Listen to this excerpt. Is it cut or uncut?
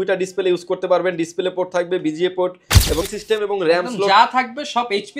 cut